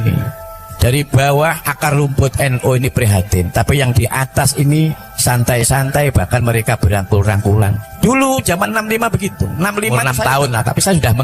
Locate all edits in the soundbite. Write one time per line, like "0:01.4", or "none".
0:07.8
0:10.0